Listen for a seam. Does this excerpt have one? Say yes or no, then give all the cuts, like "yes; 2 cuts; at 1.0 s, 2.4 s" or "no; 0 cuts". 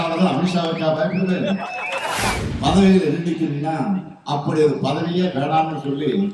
yes; 1 cut; at 2.4 s